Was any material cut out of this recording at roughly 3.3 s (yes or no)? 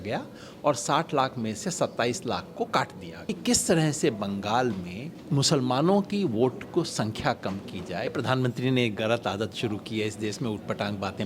yes